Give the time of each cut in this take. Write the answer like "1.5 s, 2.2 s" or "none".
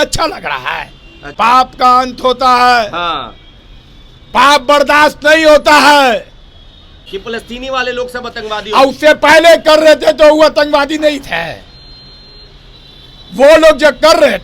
1.3 s, 7.1 s